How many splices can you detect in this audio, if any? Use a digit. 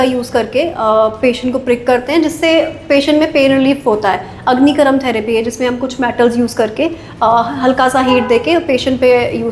0